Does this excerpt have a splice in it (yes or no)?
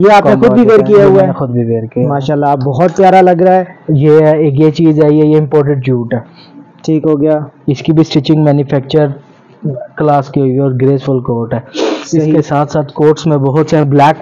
no